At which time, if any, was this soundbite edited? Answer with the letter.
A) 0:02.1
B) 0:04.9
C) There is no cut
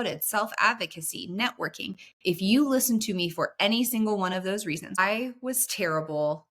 B